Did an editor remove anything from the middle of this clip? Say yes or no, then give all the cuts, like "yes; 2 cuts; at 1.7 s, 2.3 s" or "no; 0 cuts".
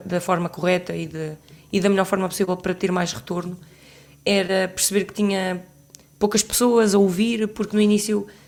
no; 0 cuts